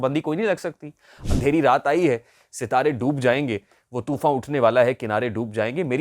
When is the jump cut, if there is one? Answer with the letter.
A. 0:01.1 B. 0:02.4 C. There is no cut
A